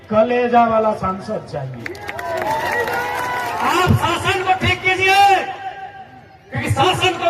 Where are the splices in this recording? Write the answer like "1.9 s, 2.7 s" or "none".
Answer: 3.6 s